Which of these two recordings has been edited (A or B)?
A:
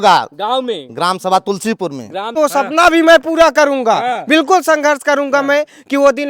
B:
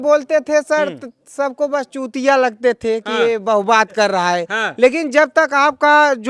A